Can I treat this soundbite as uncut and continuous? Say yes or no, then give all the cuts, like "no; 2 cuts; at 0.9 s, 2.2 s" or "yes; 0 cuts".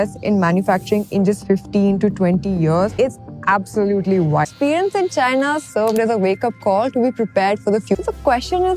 no; 3 cuts; at 2.9 s, 4.5 s, 8.0 s